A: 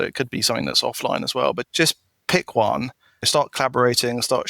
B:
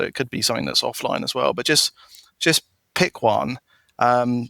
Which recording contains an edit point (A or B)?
A